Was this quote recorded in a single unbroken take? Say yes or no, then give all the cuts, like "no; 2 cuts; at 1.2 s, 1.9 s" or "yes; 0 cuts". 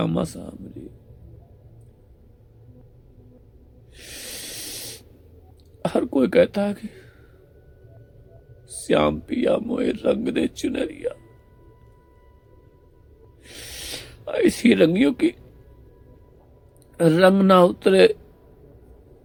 yes; 0 cuts